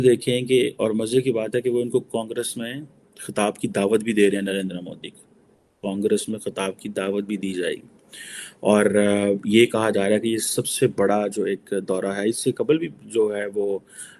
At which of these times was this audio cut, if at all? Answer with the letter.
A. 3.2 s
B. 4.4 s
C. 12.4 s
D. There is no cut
D